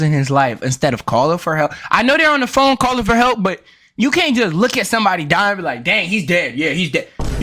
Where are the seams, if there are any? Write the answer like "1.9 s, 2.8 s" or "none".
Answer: none